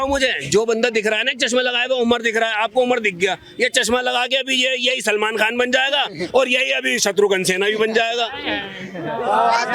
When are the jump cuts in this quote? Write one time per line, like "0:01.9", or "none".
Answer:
none